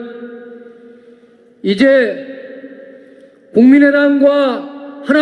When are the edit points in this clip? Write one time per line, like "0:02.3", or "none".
0:04.2